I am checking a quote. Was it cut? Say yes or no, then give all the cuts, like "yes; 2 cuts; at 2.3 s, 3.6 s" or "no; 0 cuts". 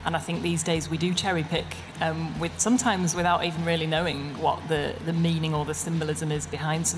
no; 0 cuts